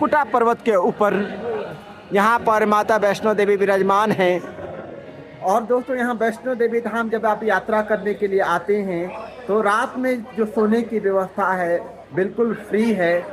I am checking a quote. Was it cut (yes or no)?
no